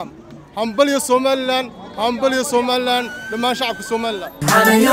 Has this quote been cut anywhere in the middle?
no; 0 cuts

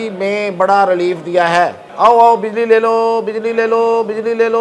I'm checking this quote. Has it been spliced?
yes; 1 cut; at 1.8 s

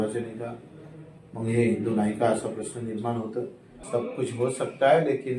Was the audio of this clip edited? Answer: yes; 1 cut; at 3.7 s

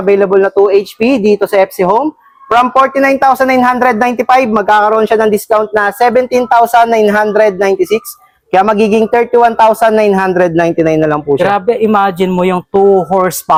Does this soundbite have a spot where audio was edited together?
no; 0 cuts

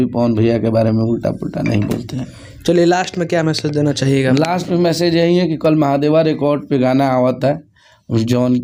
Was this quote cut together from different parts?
no; 0 cuts

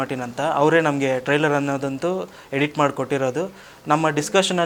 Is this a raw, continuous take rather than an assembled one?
yes; 0 cuts

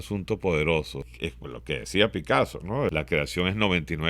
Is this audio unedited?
no; 2 cuts; at 1.1 s, 2.9 s

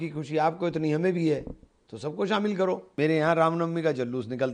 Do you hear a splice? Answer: no; 0 cuts

